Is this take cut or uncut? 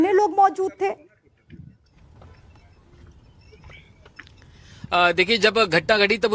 uncut